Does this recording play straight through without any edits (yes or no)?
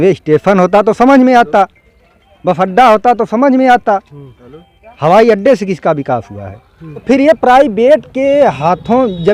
yes